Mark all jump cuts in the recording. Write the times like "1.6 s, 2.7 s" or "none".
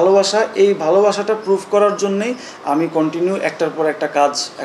none